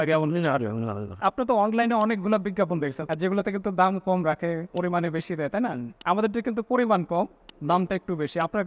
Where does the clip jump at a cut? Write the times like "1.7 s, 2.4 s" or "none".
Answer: 1.2 s, 3.0 s